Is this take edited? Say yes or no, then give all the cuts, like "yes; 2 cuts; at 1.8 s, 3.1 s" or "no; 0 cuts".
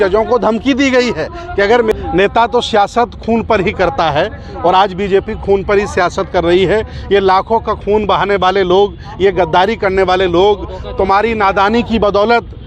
yes; 1 cut; at 1.9 s